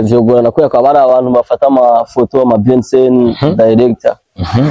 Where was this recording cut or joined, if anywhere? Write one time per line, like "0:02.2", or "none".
none